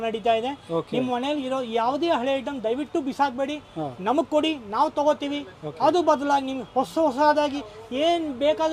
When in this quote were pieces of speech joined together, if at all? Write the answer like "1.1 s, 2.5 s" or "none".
none